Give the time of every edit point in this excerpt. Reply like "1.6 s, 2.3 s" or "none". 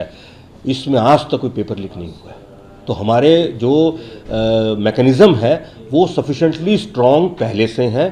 none